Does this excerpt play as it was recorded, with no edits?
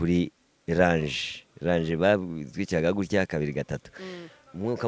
yes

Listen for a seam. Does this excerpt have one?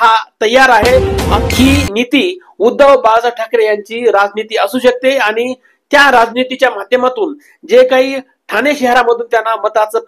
yes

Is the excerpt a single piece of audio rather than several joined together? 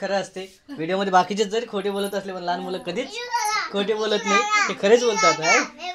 yes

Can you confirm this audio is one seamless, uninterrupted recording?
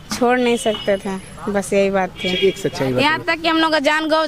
yes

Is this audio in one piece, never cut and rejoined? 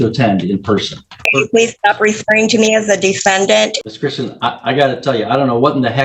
no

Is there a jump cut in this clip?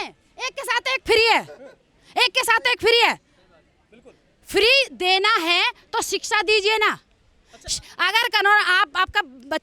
no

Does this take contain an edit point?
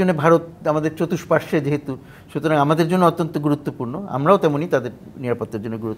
no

